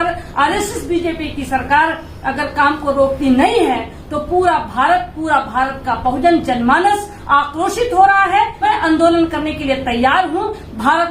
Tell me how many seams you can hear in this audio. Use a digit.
1